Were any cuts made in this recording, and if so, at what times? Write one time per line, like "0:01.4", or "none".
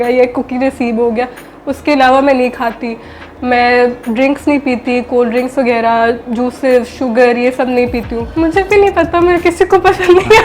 0:08.2

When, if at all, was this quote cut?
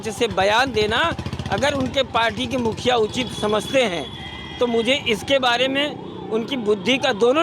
none

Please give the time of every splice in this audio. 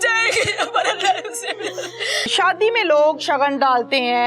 0:02.3

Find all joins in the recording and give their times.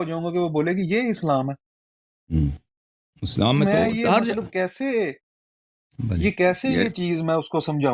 none

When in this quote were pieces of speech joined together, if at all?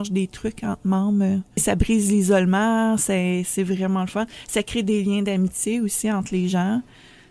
0:01.6

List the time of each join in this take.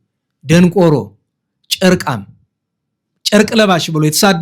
none

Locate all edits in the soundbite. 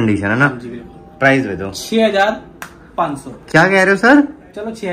none

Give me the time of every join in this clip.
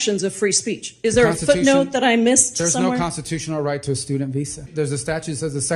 0:04.7

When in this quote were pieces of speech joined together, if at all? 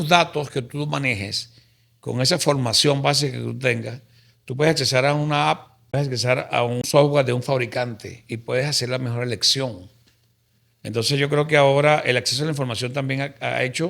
0:05.9
0:06.9

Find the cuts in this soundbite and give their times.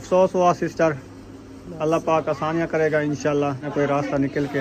0:03.7

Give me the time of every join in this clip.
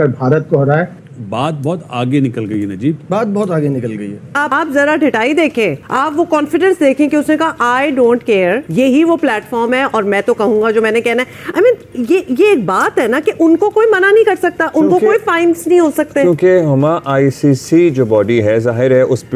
0:01.0
0:04.4
0:05.8
0:08.6

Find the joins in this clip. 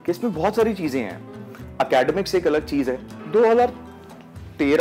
0:03.1

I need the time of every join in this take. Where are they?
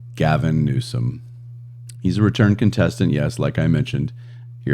none

